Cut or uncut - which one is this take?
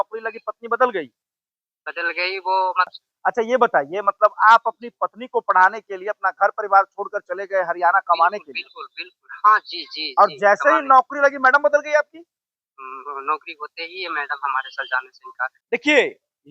cut